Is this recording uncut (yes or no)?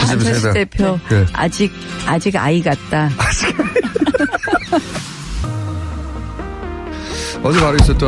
yes